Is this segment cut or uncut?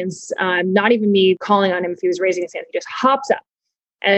cut